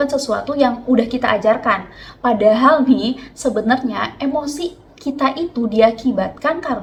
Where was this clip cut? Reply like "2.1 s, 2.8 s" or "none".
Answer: none